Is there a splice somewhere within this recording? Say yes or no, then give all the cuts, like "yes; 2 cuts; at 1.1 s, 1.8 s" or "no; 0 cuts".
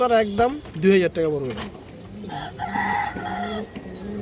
no; 0 cuts